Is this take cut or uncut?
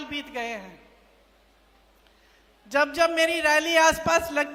uncut